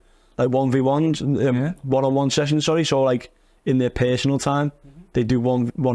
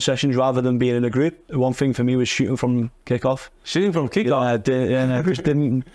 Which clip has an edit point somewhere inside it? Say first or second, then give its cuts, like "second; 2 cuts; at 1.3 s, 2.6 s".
second; 1 cut; at 1.4 s